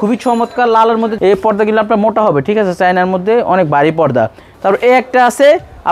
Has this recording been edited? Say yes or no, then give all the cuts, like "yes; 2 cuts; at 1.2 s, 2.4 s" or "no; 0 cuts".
yes; 2 cuts; at 1.1 s, 4.4 s